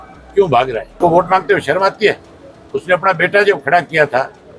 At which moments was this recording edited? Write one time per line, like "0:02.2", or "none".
0:01.0